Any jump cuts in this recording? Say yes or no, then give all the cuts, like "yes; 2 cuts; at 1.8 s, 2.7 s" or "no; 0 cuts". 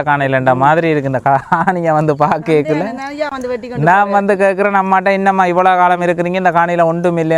no; 0 cuts